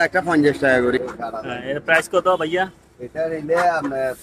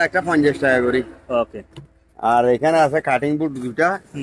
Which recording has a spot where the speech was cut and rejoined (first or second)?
first